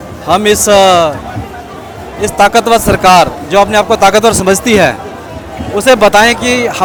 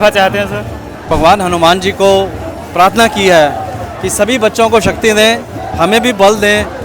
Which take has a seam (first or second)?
second